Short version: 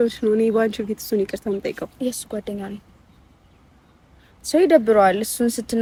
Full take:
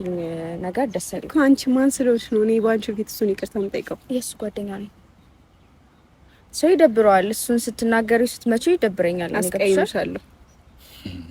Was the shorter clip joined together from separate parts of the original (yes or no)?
no